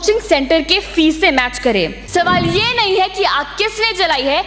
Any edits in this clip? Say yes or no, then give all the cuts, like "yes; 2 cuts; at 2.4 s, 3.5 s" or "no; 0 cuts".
yes; 1 cut; at 2.0 s